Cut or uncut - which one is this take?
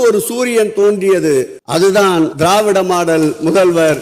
cut